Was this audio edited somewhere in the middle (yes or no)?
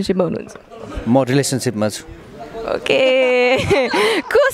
no